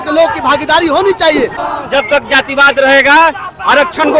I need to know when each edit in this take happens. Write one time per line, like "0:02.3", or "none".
0:01.6

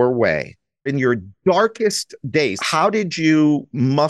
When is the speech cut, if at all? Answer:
0:00.9
0:02.6

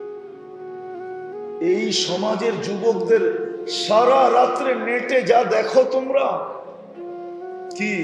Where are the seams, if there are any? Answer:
0:01.6

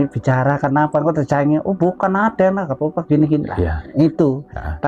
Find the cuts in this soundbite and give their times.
none

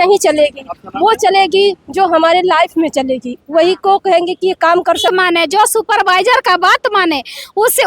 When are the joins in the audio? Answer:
0:05.1

